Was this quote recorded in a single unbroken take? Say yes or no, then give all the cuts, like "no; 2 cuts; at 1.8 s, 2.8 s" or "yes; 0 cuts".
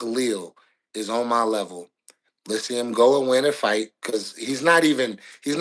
yes; 0 cuts